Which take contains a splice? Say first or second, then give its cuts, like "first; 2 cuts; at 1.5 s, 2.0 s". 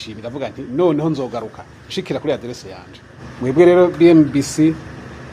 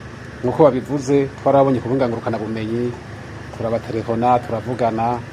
first; 1 cut; at 3.1 s